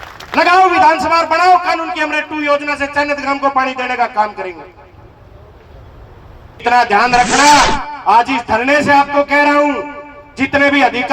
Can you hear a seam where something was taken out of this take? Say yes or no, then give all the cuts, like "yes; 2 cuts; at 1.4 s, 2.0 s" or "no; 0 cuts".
yes; 1 cut; at 6.6 s